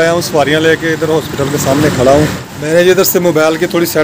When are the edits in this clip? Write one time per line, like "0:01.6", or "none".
0:02.5

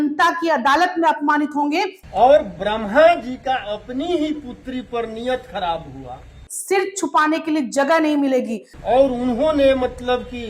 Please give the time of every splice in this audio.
0:02.0
0:06.5
0:08.6

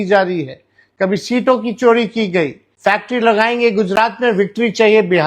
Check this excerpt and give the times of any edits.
0:02.6

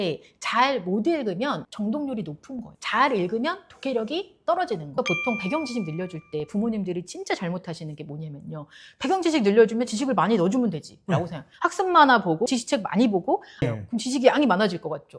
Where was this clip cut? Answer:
0:05.0
0:13.5

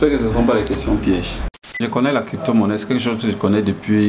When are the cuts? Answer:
0:01.6

